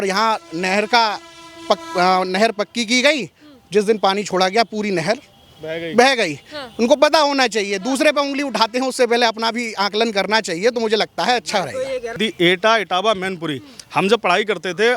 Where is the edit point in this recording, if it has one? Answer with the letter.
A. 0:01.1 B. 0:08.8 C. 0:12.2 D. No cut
C